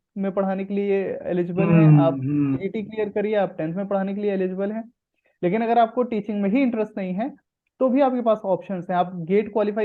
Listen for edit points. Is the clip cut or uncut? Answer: uncut